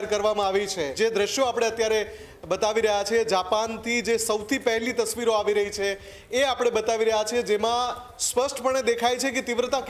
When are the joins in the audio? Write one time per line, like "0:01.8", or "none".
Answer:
0:00.9